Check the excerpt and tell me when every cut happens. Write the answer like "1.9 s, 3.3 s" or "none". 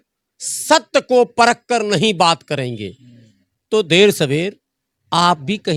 none